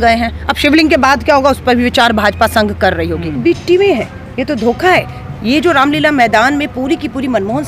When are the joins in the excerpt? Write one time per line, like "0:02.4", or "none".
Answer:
0:03.4